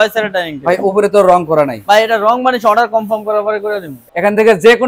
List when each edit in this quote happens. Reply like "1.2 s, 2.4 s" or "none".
4.0 s

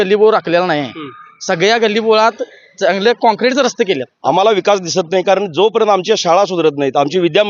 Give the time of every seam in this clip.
4.1 s

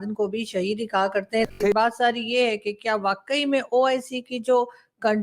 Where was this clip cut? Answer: 1.5 s

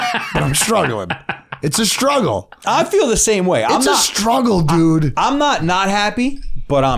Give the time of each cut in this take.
none

